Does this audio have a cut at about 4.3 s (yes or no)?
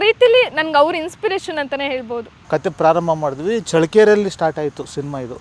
no